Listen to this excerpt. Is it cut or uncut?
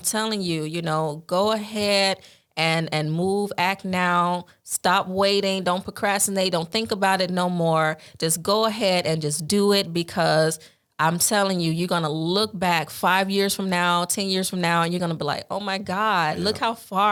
uncut